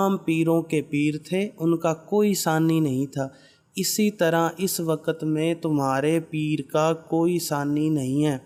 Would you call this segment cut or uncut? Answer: uncut